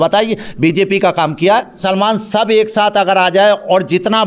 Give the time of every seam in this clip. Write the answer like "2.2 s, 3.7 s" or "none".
1.8 s